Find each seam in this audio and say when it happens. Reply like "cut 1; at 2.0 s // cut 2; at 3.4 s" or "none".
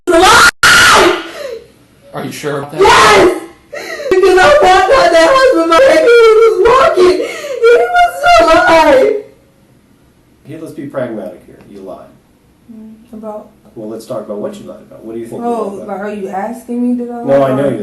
cut 1; at 10.4 s // cut 2; at 13.7 s